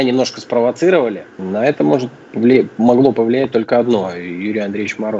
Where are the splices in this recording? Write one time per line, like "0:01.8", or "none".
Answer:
0:01.3